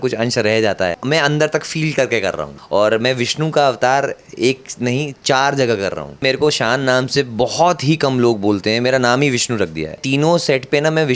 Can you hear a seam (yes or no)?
yes